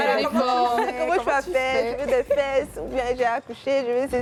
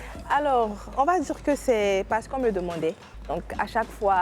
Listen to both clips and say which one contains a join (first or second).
second